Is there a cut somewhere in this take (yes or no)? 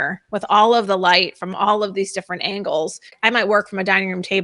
yes